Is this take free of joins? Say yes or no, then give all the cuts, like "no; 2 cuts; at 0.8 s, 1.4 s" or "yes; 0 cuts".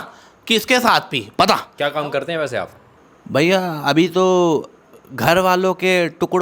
no; 1 cut; at 1.7 s